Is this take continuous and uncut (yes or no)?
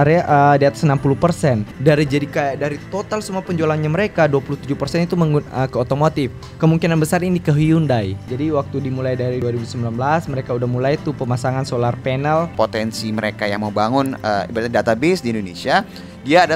no